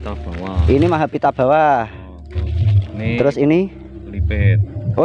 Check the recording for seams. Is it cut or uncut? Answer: uncut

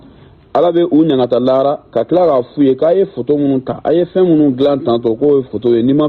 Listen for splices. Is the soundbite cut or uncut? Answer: uncut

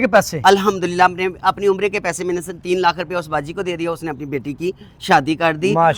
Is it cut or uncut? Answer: uncut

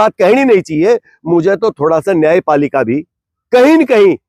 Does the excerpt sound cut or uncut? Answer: uncut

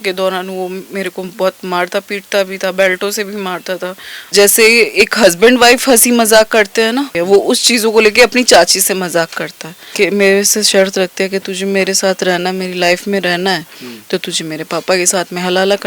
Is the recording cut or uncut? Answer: cut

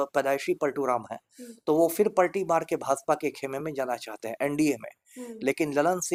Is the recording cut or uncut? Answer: uncut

